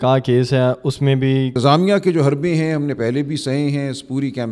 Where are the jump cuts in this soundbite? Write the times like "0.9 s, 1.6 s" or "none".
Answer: 1.5 s